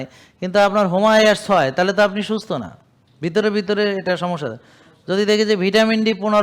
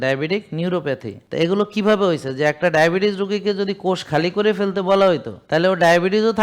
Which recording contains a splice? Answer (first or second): second